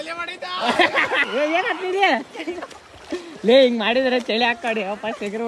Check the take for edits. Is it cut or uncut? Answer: cut